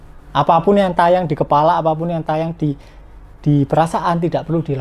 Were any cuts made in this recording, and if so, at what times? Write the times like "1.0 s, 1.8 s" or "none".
none